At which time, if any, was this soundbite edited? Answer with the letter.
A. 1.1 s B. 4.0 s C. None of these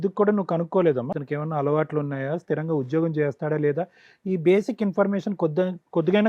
A